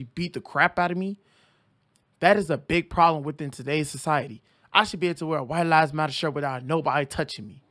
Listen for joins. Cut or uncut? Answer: uncut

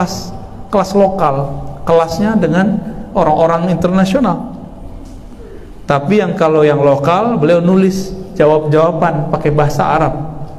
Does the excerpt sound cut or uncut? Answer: uncut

